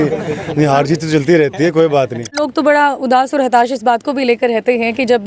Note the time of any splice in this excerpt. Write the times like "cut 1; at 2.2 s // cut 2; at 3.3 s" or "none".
cut 1; at 2.3 s

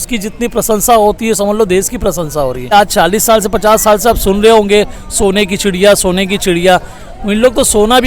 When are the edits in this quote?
cut 1; at 2.7 s

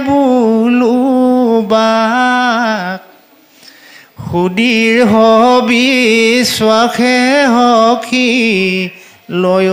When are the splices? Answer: none

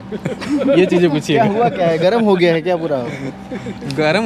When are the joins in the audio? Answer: none

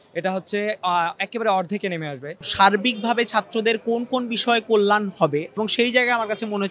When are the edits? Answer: cut 1; at 2.5 s // cut 2; at 5.6 s

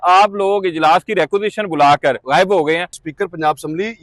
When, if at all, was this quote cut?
cut 1; at 2.2 s // cut 2; at 3.0 s

